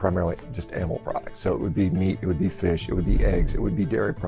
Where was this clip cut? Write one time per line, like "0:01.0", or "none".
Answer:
none